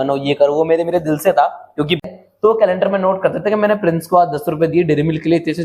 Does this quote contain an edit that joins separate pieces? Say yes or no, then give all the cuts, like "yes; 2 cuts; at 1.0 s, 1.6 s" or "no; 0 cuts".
yes; 1 cut; at 2.0 s